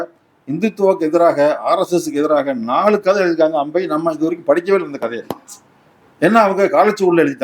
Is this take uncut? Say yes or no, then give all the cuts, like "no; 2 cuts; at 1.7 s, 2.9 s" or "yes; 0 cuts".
yes; 0 cuts